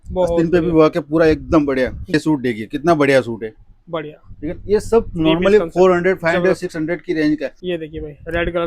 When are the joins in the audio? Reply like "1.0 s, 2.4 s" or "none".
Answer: 2.1 s, 7.6 s